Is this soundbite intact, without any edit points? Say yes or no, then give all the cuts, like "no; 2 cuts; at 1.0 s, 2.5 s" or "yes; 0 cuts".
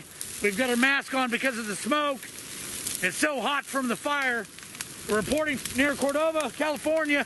yes; 0 cuts